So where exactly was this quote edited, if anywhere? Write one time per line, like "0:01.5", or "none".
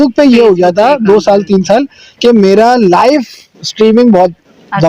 none